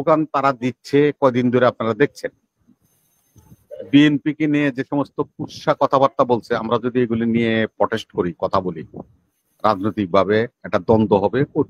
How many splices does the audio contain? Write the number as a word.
zero